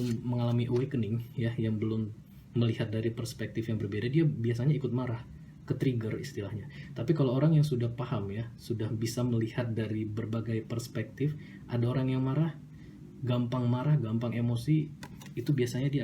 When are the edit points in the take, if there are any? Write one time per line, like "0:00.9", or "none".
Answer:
none

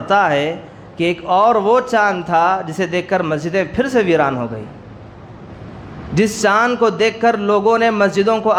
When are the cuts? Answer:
none

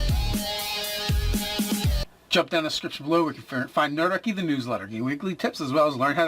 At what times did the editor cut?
0:01.9

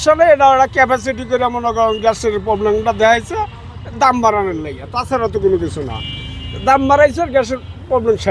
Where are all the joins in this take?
none

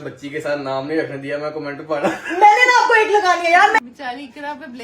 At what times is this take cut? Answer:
0:03.8

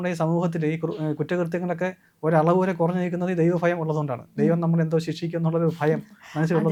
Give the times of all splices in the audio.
none

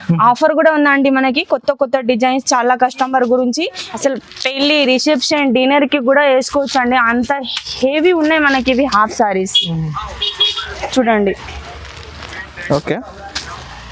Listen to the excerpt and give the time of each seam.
0:03.8

